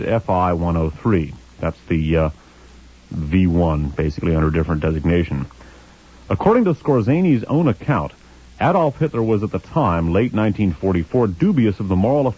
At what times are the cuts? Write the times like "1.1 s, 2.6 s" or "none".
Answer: 10.7 s